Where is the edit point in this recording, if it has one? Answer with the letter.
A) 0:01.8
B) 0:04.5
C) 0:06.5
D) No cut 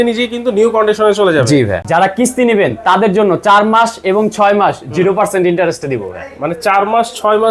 A